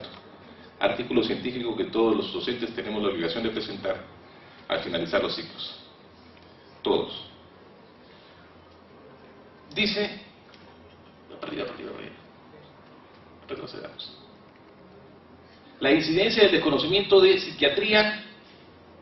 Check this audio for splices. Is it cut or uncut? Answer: uncut